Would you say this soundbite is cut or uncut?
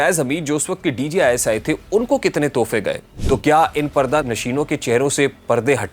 cut